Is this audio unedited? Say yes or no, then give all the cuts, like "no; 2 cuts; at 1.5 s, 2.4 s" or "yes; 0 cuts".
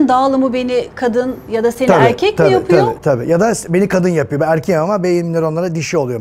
yes; 0 cuts